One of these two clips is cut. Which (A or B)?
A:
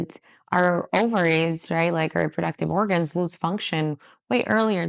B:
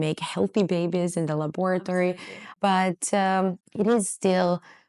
B